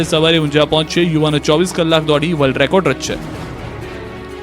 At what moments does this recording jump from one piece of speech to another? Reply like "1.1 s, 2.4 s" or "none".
2.0 s